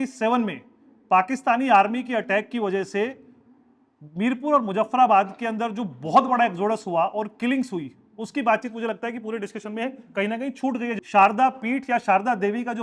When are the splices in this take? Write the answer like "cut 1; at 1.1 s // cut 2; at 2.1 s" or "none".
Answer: cut 1; at 11.0 s

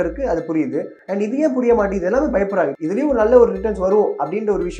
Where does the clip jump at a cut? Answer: cut 1; at 2.7 s

